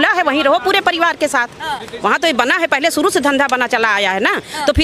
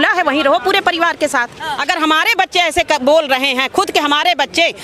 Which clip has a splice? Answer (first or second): second